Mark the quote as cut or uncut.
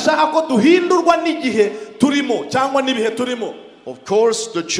uncut